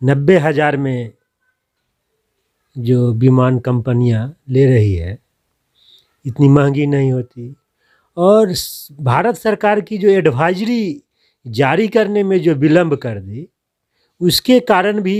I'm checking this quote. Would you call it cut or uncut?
uncut